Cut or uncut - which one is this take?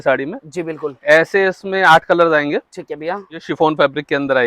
cut